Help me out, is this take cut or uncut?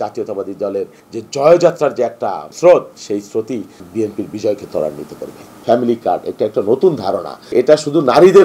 cut